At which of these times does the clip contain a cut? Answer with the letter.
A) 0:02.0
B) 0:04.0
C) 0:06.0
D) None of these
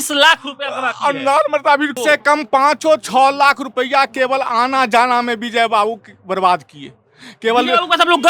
A